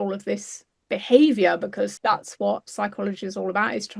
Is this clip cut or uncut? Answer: cut